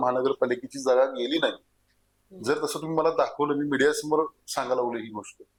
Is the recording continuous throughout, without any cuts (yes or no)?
yes